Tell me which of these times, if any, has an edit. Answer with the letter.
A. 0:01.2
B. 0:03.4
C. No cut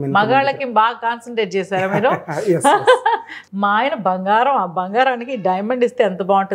B